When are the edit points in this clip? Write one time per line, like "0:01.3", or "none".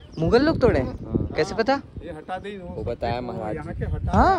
none